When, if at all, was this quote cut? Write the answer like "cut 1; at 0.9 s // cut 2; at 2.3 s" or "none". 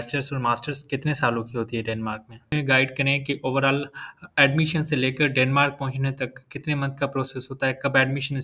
cut 1; at 2.5 s

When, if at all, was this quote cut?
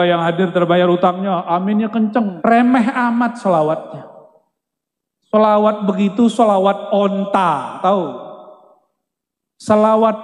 cut 1; at 2.3 s

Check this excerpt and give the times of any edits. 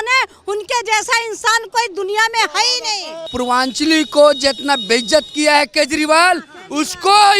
cut 1; at 3.2 s

